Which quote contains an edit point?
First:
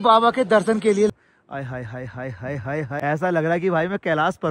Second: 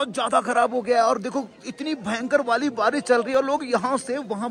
first; 2 cuts; at 1.1 s, 2.9 s

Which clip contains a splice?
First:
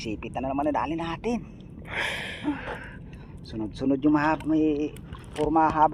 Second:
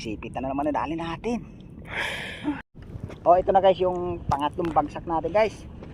second; 1 cut; at 2.7 s

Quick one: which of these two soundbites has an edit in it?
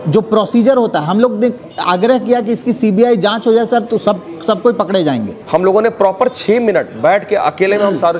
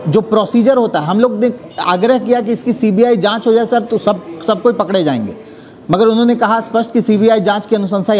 first; 1 cut; at 5.4 s

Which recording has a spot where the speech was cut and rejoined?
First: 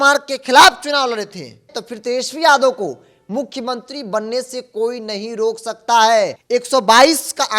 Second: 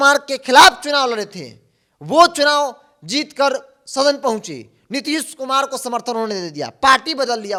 first; 2 cuts; at 1.8 s, 6.4 s

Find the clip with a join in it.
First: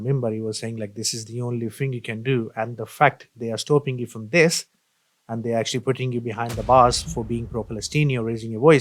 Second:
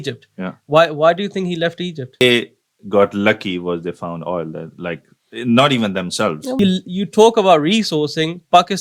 second; 2 cuts; at 2.2 s, 6.5 s

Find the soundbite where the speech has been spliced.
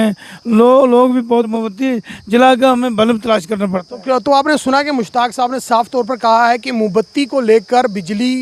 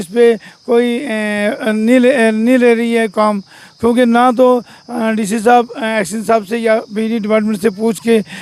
first; 1 cut; at 1.5 s

